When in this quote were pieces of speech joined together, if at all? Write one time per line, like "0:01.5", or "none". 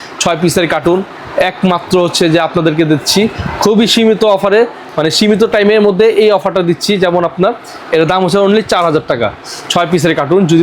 none